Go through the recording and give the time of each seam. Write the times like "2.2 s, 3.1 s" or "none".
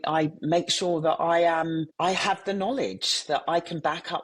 1.9 s